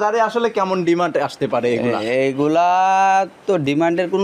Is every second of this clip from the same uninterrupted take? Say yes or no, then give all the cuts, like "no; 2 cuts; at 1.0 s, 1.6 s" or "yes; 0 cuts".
yes; 0 cuts